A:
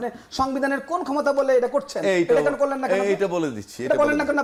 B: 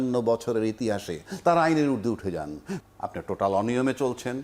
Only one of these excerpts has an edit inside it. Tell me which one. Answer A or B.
B